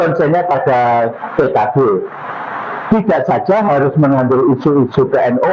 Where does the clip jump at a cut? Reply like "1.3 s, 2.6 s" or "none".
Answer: none

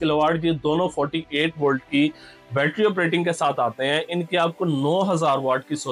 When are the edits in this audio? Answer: none

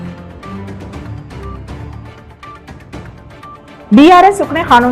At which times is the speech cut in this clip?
3.9 s

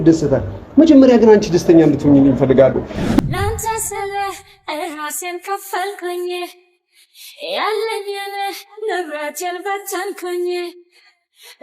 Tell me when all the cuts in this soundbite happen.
3.2 s

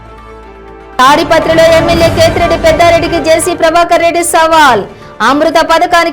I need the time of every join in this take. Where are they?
1.0 s

